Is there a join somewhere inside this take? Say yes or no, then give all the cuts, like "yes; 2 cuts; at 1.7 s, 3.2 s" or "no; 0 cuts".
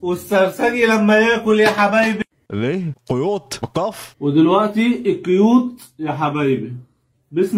no; 0 cuts